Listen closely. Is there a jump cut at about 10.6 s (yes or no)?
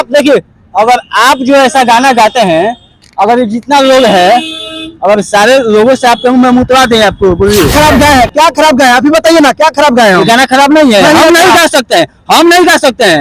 no